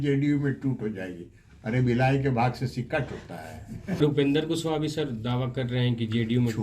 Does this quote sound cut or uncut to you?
cut